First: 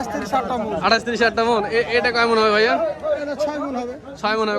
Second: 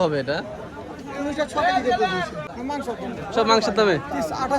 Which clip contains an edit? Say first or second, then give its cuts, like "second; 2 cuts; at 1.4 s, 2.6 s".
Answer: second; 1 cut; at 2.5 s